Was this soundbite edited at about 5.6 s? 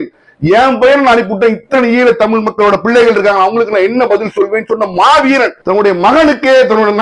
yes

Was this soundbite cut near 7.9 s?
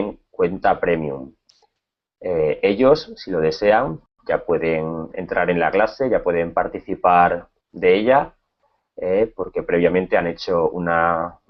no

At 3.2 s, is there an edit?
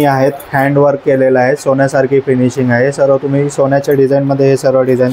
no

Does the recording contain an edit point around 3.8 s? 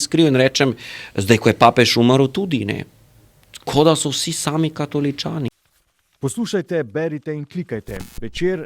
no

